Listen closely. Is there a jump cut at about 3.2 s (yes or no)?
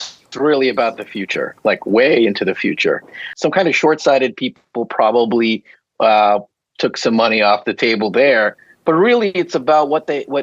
yes